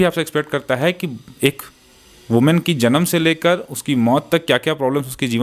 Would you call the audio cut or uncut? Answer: uncut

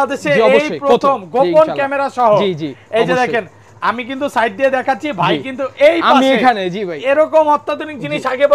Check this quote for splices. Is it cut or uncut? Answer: uncut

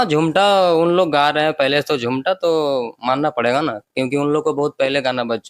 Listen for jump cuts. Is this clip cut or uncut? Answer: uncut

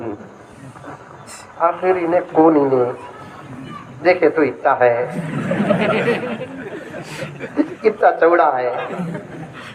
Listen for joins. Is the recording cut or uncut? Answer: uncut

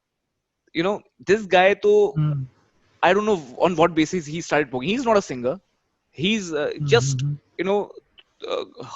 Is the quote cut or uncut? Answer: uncut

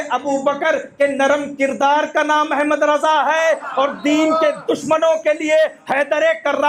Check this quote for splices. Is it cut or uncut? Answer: uncut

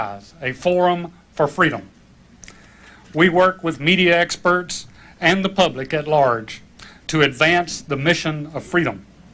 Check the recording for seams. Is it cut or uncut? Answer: cut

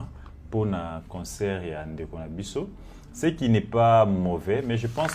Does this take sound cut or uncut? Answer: uncut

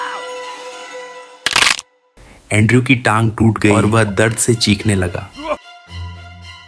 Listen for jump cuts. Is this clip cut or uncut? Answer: cut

